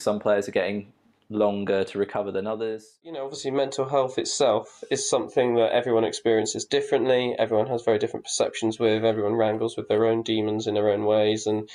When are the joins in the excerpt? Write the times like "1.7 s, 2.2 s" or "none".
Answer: 3.4 s